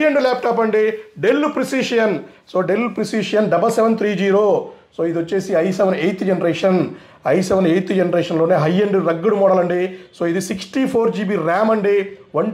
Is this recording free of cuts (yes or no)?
yes